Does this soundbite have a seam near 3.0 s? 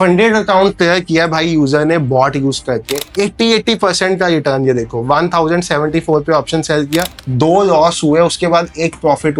yes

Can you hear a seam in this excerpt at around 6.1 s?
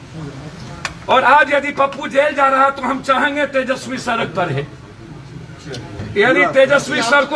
yes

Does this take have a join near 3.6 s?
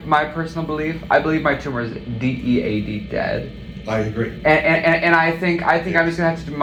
no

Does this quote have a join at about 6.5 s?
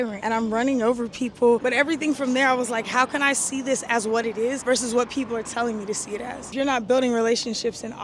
yes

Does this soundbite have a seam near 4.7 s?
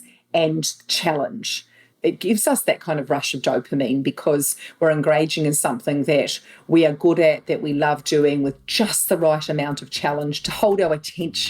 no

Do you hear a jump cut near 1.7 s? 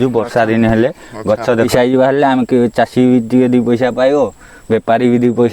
yes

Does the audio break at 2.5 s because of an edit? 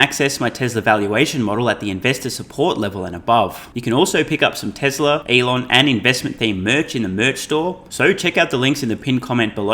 no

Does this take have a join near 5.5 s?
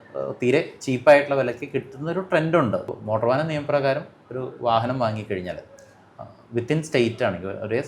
no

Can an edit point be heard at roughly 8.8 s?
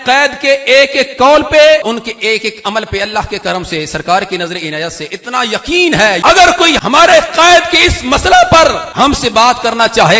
yes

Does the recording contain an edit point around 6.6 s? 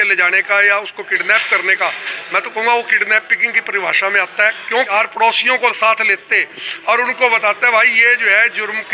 no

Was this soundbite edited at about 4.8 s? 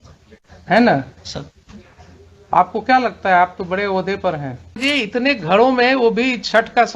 yes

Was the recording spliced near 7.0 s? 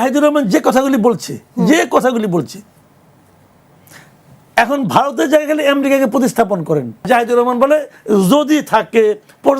yes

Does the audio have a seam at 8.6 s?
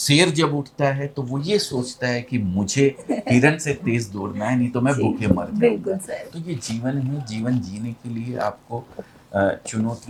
no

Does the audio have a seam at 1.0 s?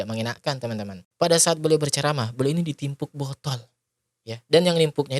yes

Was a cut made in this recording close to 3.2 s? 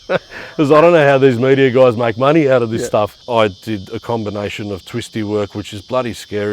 yes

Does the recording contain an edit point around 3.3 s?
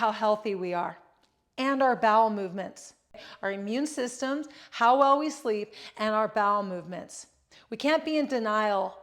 yes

